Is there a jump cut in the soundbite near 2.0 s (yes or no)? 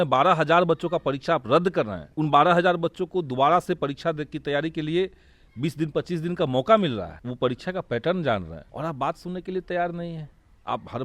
yes